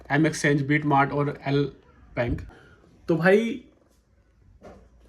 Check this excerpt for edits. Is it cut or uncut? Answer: uncut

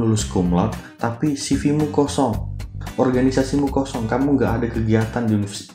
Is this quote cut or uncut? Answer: uncut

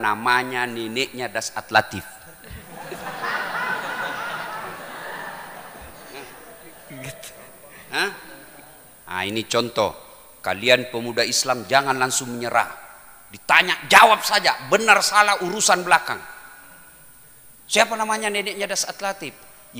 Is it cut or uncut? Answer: uncut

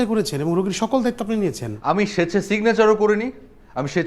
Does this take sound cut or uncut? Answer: cut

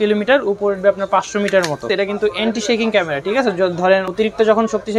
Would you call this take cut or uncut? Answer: cut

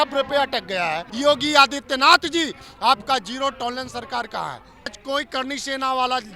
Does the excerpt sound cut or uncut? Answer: cut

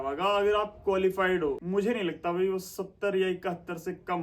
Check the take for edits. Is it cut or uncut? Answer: cut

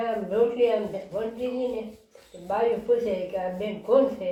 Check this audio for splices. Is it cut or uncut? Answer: uncut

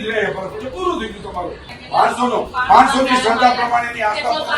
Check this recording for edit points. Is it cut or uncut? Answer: cut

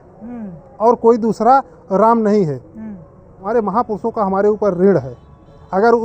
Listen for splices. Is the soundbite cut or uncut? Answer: cut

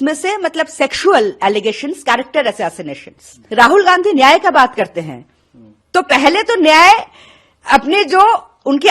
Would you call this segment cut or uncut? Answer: cut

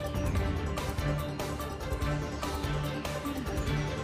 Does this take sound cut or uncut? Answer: uncut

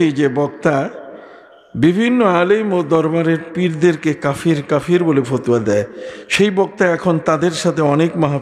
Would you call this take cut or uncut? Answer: uncut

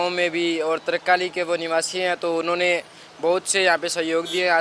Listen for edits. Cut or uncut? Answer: uncut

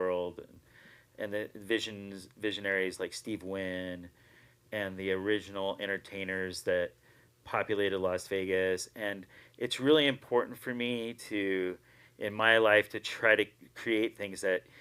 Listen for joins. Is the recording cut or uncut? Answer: uncut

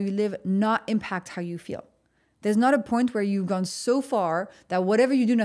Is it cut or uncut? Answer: uncut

